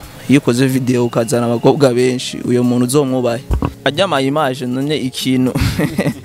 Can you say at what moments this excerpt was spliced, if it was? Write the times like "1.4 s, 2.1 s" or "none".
3.7 s